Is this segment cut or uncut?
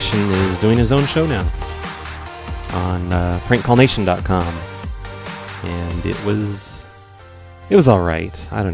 cut